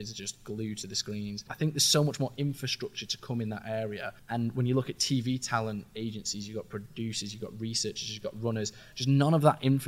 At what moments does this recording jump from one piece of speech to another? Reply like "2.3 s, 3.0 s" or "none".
1.5 s, 4.1 s